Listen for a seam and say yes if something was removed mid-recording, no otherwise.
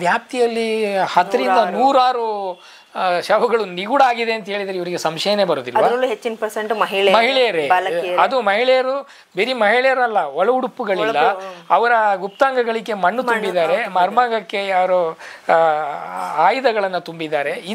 no